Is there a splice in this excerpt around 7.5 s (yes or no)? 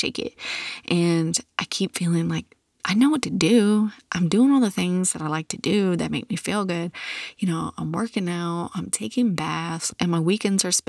no